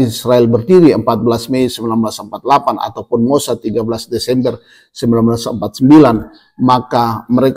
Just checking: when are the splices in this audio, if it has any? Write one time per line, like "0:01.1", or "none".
none